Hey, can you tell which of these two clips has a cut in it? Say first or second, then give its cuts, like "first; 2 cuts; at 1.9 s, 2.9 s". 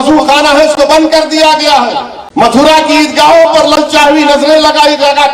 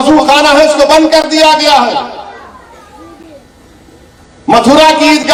first; 1 cut; at 2.2 s